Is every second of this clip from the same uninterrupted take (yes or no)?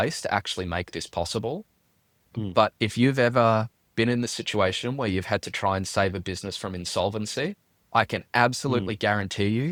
yes